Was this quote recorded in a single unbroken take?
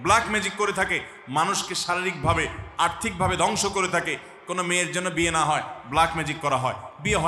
yes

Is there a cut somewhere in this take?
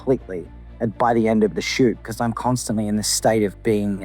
yes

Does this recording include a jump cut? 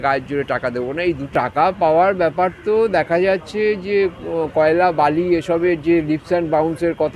yes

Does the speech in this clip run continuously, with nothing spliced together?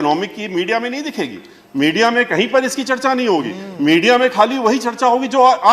yes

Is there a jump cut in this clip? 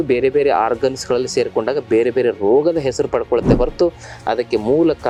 no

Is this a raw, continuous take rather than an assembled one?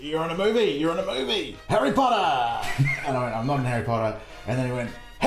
no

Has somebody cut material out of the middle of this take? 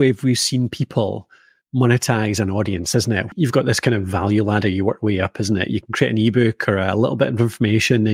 yes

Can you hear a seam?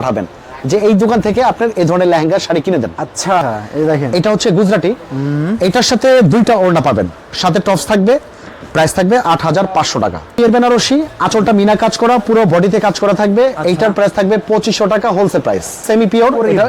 yes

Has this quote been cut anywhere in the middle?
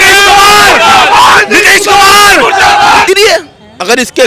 yes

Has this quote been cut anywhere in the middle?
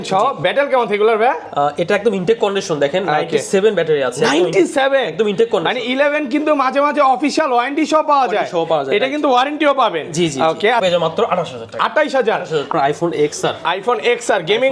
yes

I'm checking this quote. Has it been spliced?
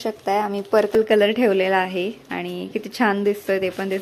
yes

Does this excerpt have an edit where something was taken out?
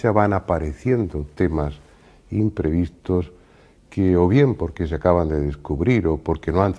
no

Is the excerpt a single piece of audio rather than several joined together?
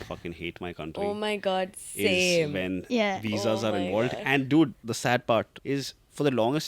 no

